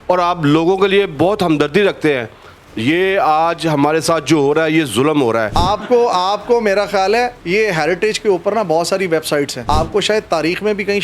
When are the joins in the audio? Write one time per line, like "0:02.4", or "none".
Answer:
0:05.5
0:09.6